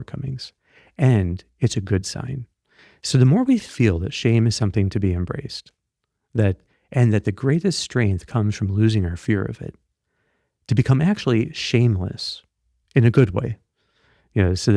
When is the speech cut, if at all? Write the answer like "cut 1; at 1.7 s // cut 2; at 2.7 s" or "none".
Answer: none